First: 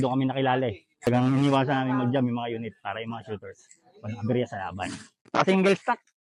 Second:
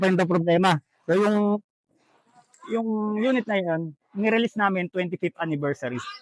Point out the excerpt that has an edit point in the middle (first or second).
first